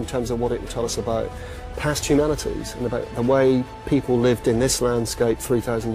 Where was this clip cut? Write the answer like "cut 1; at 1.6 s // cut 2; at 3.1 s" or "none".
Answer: none